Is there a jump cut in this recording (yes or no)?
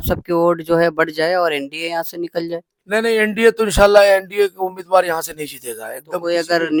no